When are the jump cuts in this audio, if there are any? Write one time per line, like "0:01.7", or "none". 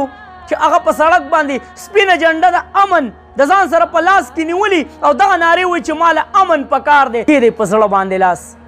0:07.2